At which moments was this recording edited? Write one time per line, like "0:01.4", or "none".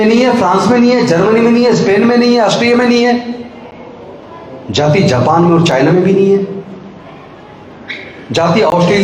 none

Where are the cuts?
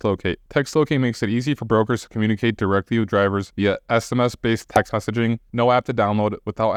none

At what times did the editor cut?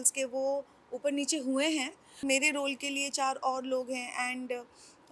0:02.2

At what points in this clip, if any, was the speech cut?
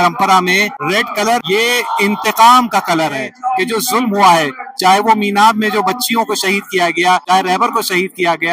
0:01.1
0:03.3
0:07.2

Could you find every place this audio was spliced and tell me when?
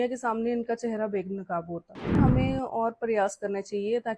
0:02.2

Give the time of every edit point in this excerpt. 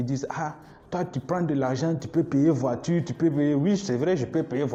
none

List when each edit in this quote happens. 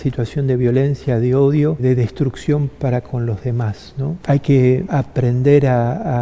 0:01.8
0:04.2
0:04.9

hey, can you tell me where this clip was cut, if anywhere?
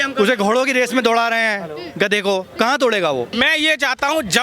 0:03.3

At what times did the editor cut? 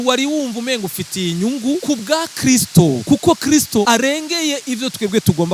0:01.8
0:03.0
0:03.9

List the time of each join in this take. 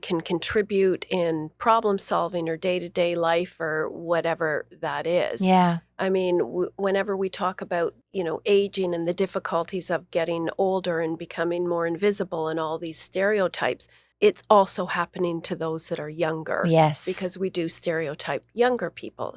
0:08.0
0:14.0

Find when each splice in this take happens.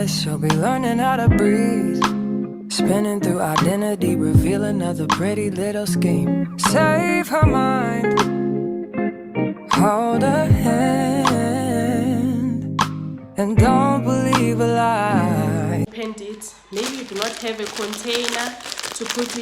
0:15.8

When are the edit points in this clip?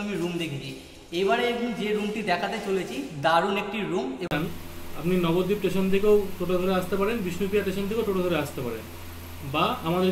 0:04.3

